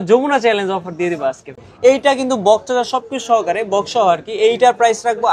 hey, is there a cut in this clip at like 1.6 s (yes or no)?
yes